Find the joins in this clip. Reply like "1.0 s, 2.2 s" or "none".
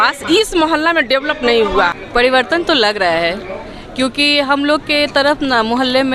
2.0 s